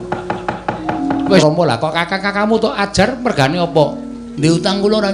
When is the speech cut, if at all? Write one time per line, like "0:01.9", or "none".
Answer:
0:01.4